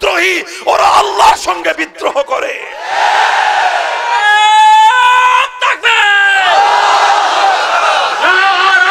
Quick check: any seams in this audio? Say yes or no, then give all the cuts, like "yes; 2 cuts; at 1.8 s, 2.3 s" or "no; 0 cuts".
no; 0 cuts